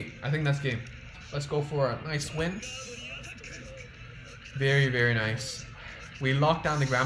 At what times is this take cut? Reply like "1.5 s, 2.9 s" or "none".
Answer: 1.2 s

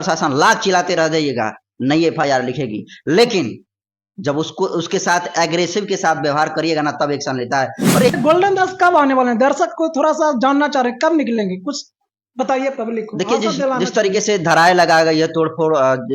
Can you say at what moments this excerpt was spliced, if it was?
8.1 s

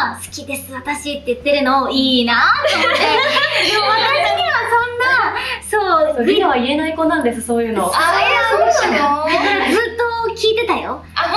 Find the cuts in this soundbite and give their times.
none

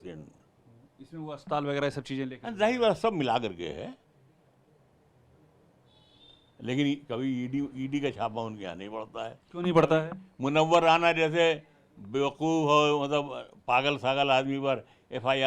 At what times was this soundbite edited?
none

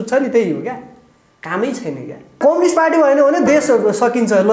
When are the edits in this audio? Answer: 2.4 s

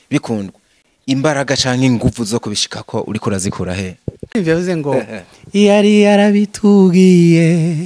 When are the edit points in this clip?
4.3 s

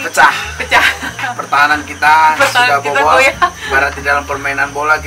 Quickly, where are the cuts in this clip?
1.3 s, 3.6 s

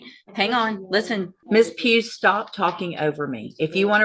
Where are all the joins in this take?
1.4 s

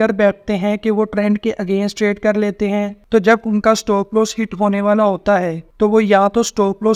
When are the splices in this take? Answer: none

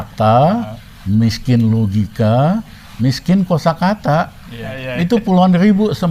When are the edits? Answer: 4.8 s

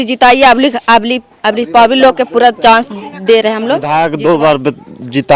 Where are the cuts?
3.8 s

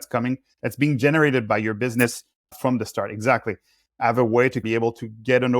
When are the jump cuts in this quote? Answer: 4.0 s

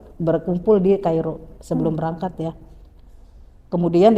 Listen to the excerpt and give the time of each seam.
none

